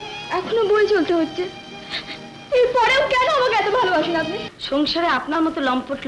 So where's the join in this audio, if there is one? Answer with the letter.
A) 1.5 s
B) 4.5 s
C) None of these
B